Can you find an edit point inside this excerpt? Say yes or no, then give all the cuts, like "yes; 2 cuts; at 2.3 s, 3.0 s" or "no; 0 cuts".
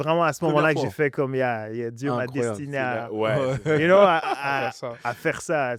no; 0 cuts